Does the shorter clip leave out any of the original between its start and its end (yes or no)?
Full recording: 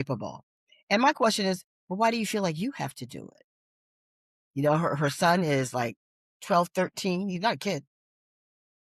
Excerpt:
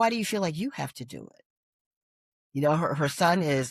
no